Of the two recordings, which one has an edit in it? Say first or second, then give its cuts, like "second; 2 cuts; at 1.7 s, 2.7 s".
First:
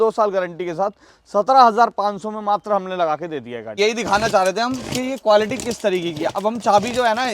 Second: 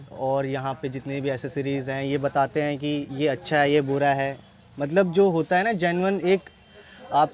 first; 1 cut; at 3.8 s